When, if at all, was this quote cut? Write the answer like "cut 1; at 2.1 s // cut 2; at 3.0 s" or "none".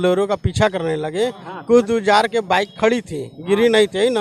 none